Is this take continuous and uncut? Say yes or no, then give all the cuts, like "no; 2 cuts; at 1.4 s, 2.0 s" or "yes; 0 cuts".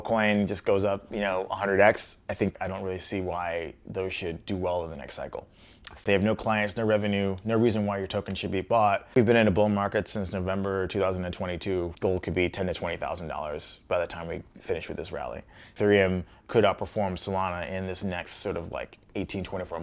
no; 5 cuts; at 2.5 s, 6.0 s, 9.1 s, 11.9 s, 15.7 s